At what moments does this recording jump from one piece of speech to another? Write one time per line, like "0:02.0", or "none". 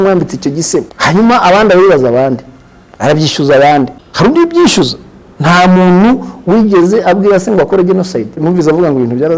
0:00.9
0:04.0
0:08.4